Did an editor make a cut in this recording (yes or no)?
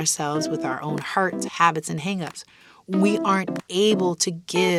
no